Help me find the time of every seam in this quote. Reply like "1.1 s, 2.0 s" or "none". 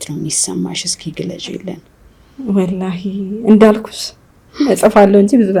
none